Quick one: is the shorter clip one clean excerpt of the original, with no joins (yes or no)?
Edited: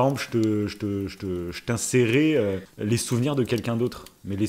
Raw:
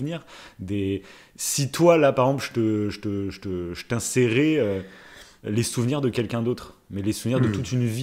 no